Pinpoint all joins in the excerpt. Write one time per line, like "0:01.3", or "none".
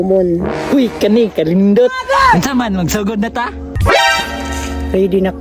0:03.7